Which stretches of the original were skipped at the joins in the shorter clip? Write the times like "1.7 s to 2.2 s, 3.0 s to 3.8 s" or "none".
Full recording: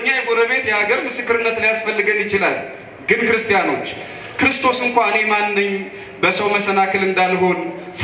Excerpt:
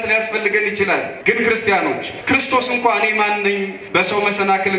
2.7 s to 3.0 s, 3.9 s to 4.2 s, 5.9 s to 6.1 s